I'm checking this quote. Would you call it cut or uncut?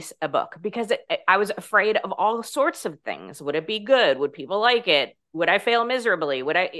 cut